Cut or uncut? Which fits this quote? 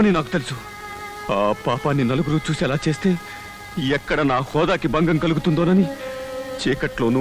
uncut